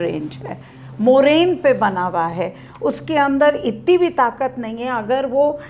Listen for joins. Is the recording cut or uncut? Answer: uncut